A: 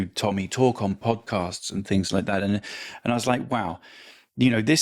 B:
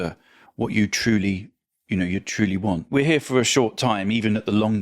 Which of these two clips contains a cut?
B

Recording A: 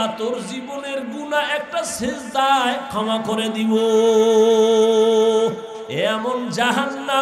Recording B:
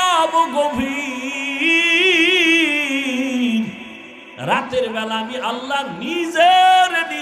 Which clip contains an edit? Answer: A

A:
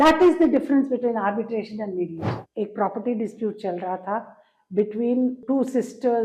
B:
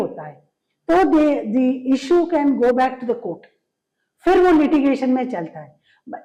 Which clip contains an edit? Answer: A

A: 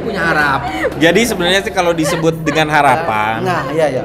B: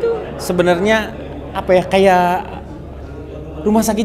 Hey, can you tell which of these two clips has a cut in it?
A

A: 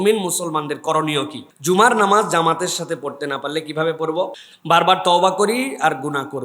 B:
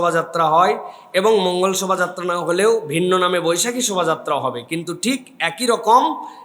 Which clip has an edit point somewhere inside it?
A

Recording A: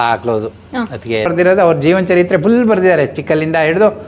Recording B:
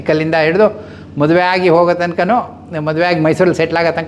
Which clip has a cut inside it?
A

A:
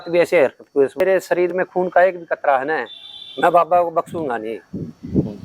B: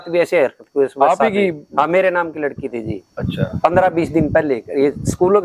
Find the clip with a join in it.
A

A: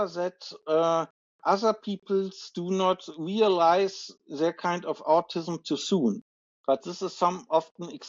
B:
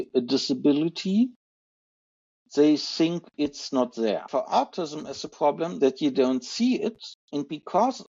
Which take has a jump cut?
B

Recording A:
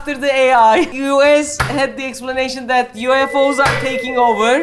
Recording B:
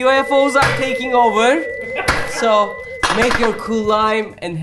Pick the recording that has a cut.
A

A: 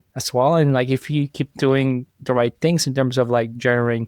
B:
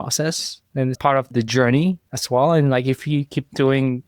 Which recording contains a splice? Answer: B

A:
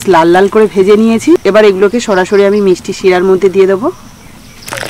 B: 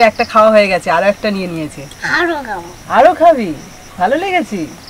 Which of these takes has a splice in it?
A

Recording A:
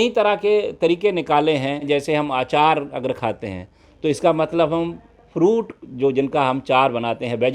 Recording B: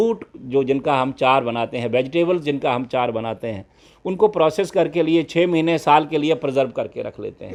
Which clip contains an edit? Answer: A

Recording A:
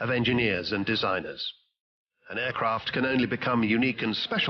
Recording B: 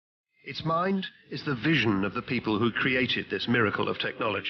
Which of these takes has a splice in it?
B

